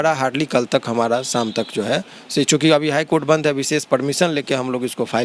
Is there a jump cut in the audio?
no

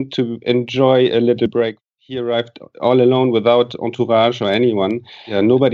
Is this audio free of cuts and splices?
no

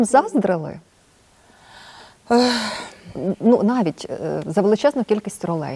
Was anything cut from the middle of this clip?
no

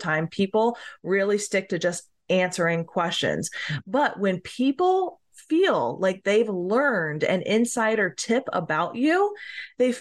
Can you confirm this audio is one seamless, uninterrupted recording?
yes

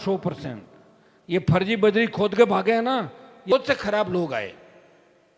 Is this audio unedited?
no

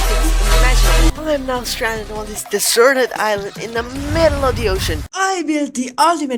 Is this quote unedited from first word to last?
no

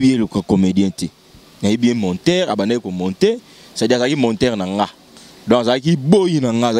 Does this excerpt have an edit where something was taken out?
no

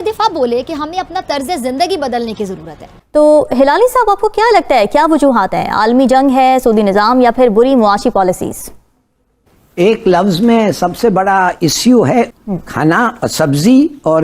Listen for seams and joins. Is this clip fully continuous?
no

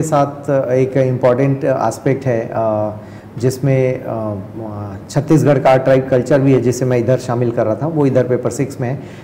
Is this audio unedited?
yes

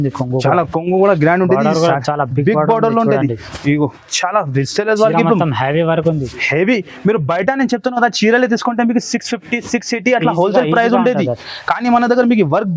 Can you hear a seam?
no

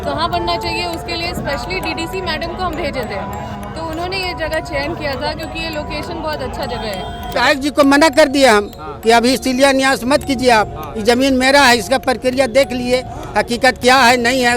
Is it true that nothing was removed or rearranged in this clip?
no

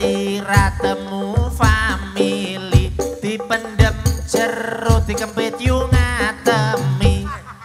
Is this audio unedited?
yes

